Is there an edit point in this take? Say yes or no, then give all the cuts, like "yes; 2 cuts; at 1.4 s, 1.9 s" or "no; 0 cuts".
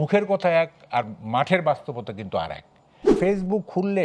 yes; 1 cut; at 3.1 s